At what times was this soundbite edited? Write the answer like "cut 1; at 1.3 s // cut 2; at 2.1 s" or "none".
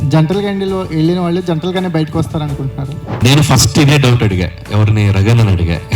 cut 1; at 3.2 s